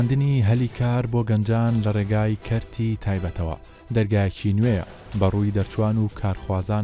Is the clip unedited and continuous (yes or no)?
yes